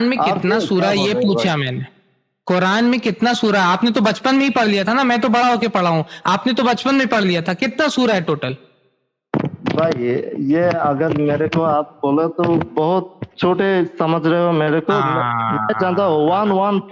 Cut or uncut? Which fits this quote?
uncut